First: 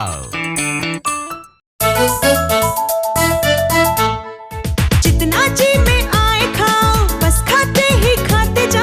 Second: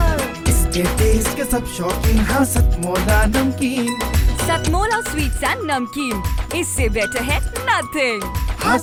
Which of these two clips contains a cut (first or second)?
first